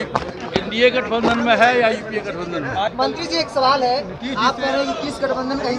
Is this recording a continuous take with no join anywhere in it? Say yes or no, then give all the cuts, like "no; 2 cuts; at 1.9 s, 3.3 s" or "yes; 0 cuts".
yes; 0 cuts